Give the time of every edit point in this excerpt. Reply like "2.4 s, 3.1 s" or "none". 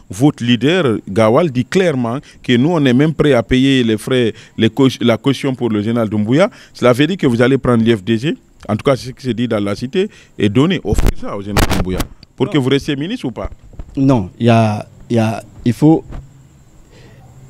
none